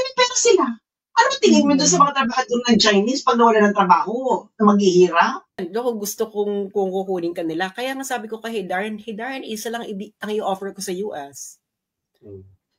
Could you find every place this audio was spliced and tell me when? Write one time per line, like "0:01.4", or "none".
0:05.6